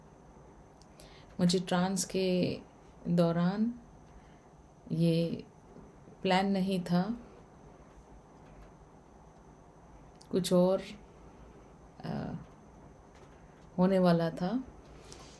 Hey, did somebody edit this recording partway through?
no; 0 cuts

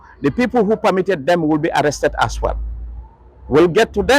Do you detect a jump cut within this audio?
no; 0 cuts

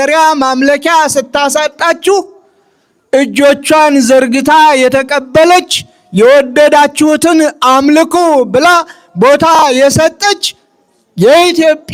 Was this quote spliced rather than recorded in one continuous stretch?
no; 0 cuts

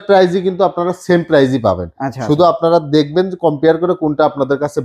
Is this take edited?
no; 0 cuts

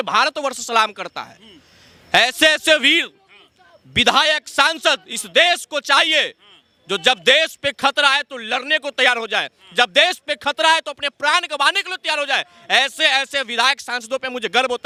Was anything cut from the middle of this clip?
no; 0 cuts

